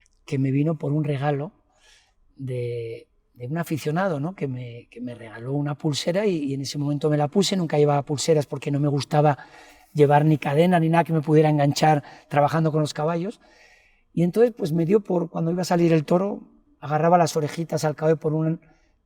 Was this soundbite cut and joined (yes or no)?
no